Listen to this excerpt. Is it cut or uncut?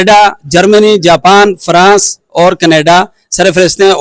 uncut